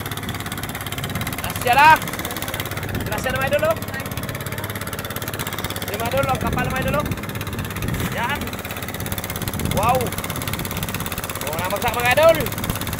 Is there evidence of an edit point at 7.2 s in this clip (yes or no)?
no